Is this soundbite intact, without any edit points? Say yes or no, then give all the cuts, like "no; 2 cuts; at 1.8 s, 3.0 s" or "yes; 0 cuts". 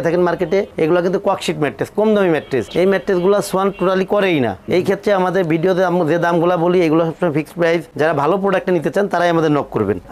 yes; 0 cuts